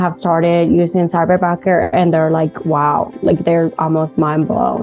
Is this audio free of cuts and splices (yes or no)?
yes